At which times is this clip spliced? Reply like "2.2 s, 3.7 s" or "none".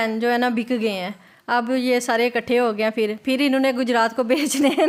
none